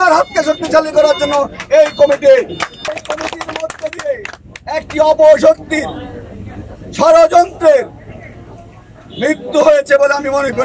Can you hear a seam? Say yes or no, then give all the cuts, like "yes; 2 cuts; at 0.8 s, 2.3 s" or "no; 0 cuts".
yes; 1 cut; at 2.9 s